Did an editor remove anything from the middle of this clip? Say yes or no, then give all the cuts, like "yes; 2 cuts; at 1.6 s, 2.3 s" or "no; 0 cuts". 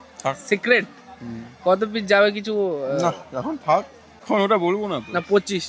no; 0 cuts